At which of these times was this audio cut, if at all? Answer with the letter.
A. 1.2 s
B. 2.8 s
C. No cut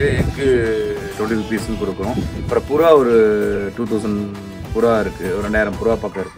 C